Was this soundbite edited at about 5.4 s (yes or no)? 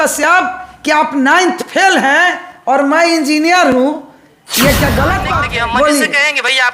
yes